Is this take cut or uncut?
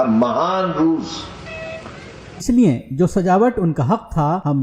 uncut